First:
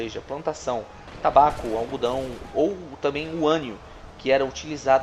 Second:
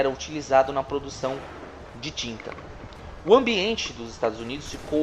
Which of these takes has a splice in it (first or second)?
second